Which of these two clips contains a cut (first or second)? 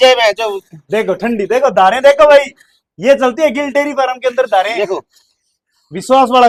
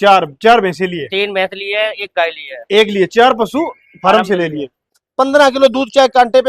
second